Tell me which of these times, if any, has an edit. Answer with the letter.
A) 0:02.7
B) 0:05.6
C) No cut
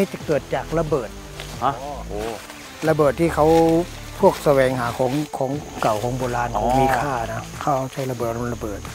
A